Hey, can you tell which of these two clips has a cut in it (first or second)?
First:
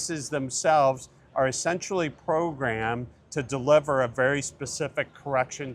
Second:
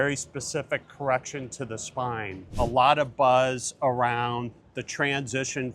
second